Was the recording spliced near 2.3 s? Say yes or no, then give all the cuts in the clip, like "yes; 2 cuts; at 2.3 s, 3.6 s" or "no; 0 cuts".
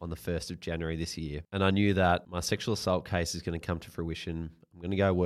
yes; 2 cuts; at 1.4 s, 2.3 s